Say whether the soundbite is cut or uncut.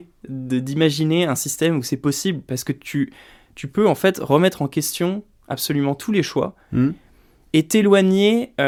uncut